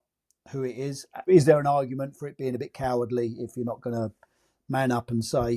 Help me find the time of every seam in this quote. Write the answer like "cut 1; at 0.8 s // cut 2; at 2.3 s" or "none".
cut 1; at 1.2 s